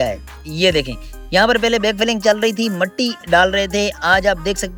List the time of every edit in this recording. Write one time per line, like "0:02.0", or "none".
none